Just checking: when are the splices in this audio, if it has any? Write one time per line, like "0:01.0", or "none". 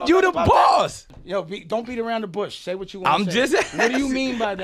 0:01.2